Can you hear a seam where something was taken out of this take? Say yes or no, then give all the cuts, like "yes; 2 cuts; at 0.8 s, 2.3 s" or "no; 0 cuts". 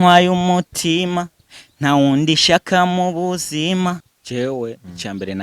yes; 1 cut; at 4.1 s